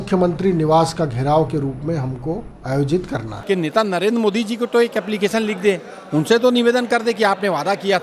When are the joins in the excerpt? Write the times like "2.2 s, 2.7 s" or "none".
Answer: 2.5 s, 3.3 s